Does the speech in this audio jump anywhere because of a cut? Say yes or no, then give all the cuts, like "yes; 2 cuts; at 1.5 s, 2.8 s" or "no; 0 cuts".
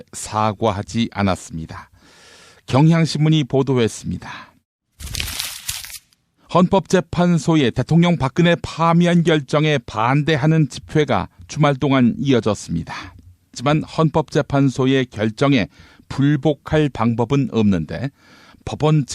yes; 1 cut; at 10.4 s